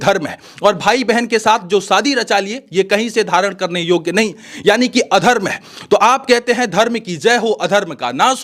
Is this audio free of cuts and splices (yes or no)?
yes